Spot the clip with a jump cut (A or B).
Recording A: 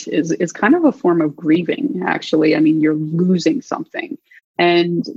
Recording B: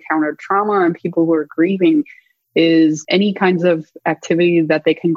B